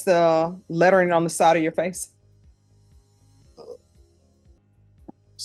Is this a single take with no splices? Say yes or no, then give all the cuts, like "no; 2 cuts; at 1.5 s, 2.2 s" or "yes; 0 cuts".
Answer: yes; 0 cuts